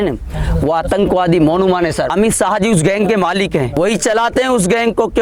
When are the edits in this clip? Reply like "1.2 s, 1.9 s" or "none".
2.1 s, 3.7 s